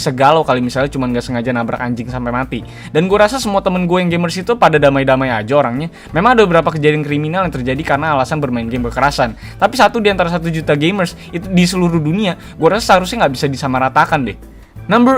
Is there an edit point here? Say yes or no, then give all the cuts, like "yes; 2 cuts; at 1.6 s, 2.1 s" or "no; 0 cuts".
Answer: no; 0 cuts